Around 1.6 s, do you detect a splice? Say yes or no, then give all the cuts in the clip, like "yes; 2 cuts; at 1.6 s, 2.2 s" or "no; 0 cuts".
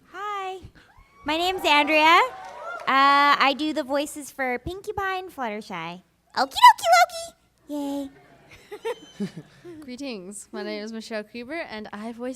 yes; 1 cut; at 1.6 s